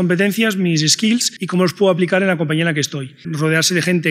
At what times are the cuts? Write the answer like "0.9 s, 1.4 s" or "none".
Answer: 1.4 s, 3.3 s

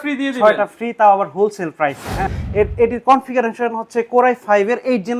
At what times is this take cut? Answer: 2.2 s

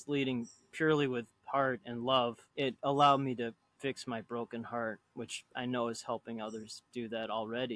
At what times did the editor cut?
2.4 s, 3.7 s

